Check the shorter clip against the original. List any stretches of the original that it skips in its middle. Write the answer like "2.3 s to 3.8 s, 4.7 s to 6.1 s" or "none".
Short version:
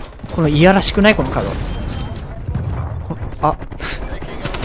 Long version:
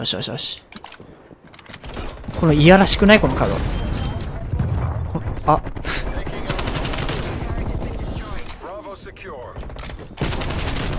none